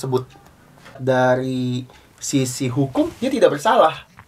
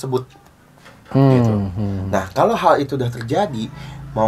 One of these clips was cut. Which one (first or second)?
first